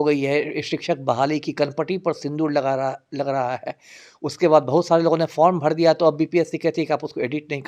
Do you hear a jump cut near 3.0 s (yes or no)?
no